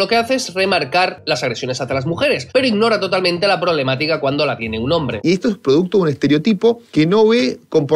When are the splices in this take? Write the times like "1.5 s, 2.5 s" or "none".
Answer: 1.2 s, 5.2 s, 6.8 s